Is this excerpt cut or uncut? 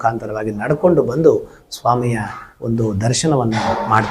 uncut